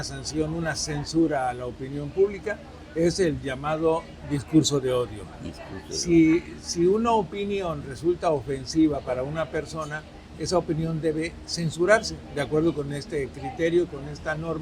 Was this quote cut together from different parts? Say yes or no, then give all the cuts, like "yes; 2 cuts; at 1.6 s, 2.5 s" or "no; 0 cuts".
no; 0 cuts